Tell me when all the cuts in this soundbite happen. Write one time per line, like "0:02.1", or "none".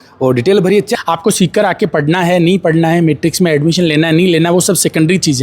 0:00.9